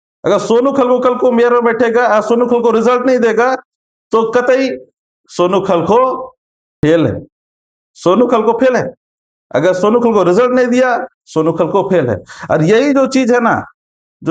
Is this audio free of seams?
yes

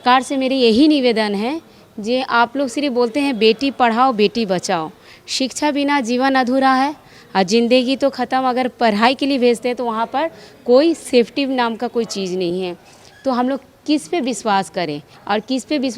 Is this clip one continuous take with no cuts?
yes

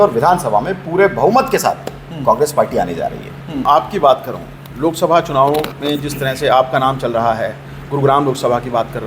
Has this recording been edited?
yes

